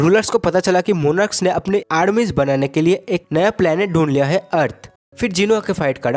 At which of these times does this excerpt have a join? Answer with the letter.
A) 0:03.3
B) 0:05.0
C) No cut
B